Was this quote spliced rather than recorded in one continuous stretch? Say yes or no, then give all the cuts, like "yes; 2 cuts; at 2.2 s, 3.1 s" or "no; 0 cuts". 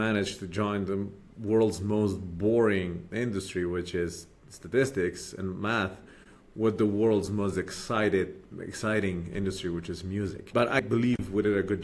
yes; 1 cut; at 10.8 s